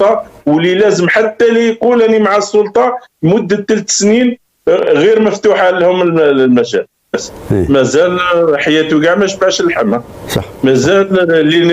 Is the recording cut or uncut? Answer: cut